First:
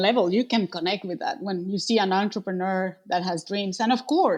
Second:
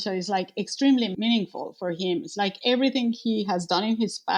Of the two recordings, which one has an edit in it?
second; 1 cut; at 1.1 s

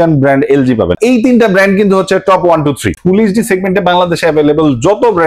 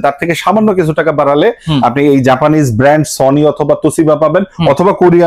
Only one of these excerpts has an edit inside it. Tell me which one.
first; 2 cuts; at 1.0 s, 3.0 s

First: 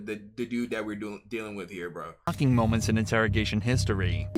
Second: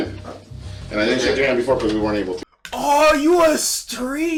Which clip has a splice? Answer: first; 1 cut; at 2.3 s

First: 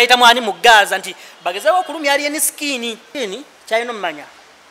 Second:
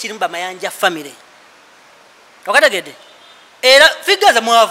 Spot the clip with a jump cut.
first; 1 cut; at 3.1 s

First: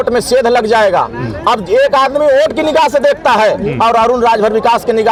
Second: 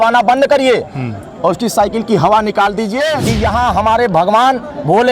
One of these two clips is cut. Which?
second; 1 cut; at 3.2 s

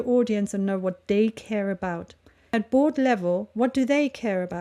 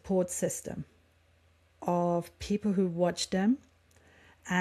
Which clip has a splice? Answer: first; 1 cut; at 2.5 s

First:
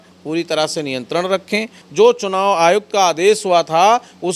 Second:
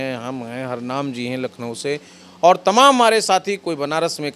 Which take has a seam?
first; 1 cut; at 1.8 s

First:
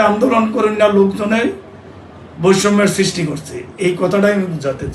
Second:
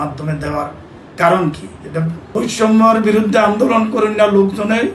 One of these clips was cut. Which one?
second; 1 cut; at 2.2 s

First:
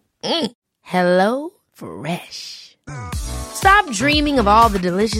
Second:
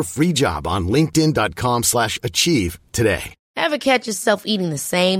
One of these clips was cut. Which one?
second; 1 cut; at 3.4 s

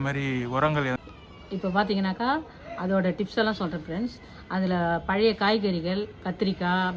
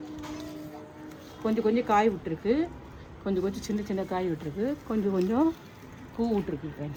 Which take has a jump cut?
first; 1 cut; at 1.0 s

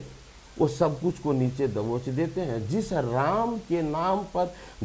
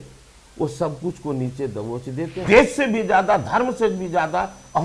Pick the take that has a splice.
second; 1 cut; at 2.4 s

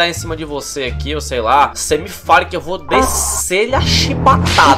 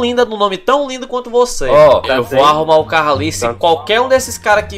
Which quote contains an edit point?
second; 1 cut; at 1.7 s

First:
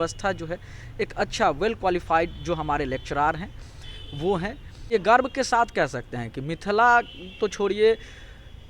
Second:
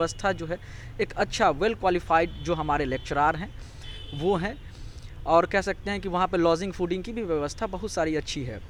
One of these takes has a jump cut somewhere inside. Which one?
first; 1 cut; at 4.8 s

